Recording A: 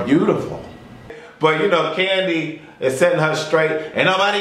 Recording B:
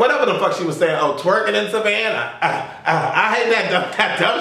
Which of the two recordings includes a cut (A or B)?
A